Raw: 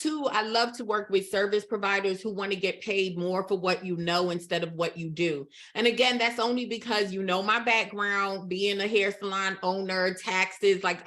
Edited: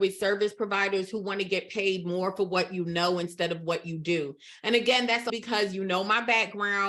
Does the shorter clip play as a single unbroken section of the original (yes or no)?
no